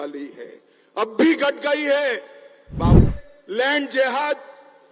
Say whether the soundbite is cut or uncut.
cut